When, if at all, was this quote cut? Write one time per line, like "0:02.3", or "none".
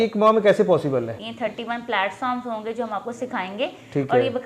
0:01.1

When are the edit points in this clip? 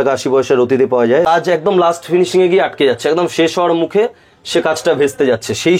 0:01.3

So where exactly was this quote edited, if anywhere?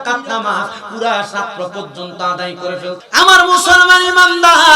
0:03.0

